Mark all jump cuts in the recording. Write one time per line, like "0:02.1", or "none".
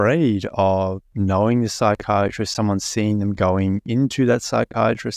0:01.1

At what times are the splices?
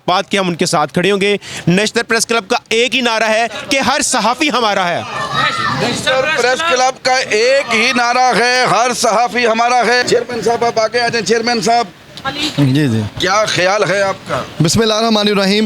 none

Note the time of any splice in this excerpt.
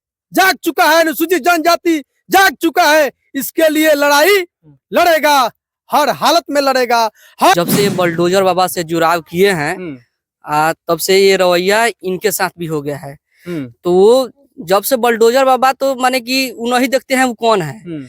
0:07.5

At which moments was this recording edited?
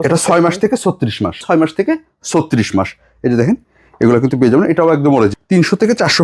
0:01.4
0:05.3

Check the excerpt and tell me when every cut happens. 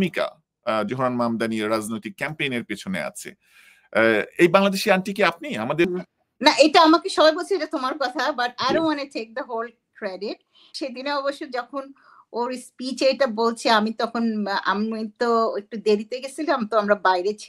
0:05.8
0:10.7

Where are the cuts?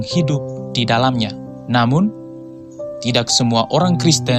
0:01.5

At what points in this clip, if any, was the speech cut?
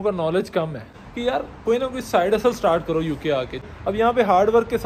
0:00.9
0:03.6

